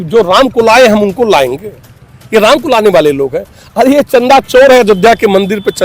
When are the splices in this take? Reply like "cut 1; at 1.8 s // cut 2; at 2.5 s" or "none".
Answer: none